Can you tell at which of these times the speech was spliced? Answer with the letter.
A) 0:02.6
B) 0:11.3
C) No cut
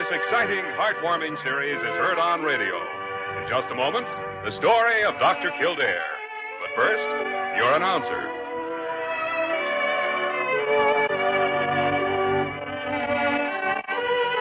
A